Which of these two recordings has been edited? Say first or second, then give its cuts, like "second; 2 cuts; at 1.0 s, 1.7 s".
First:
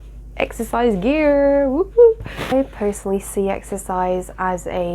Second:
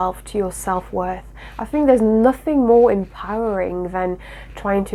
first; 1 cut; at 2.5 s